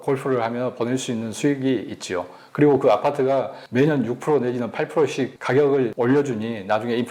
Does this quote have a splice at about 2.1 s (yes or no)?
no